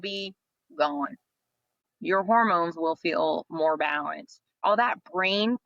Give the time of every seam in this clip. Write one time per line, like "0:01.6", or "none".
0:01.9
0:04.6